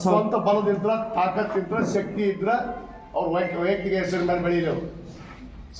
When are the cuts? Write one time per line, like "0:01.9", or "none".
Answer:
none